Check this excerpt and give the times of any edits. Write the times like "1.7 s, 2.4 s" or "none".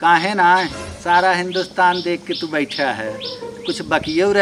none